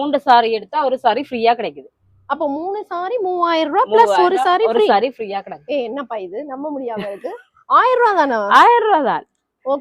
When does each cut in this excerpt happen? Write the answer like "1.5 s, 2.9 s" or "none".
none